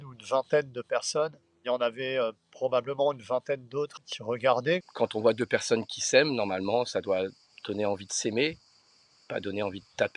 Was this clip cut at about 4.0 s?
yes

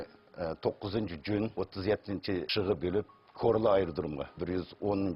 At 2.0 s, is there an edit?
no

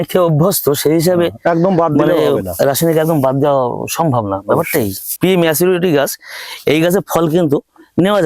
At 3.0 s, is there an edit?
no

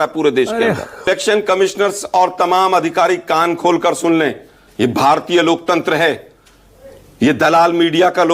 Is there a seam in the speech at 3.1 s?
no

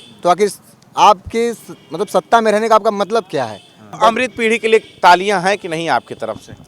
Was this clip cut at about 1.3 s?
no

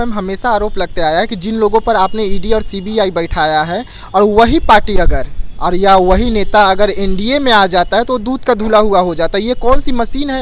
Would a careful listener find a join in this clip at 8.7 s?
no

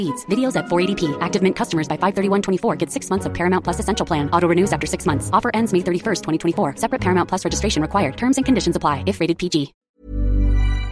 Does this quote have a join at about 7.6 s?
no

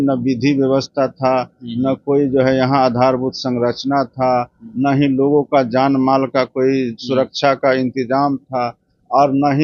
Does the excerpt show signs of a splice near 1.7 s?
no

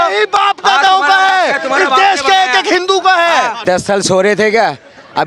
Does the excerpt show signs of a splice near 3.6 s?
yes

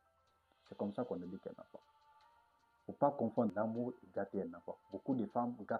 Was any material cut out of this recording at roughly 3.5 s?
yes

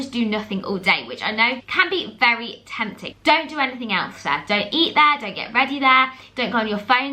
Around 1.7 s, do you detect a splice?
yes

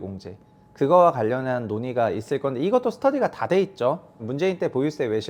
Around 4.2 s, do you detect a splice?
yes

